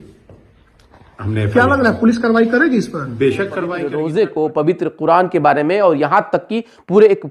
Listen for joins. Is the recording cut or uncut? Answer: cut